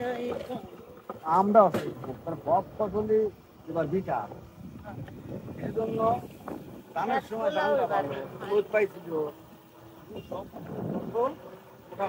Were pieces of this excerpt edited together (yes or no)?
no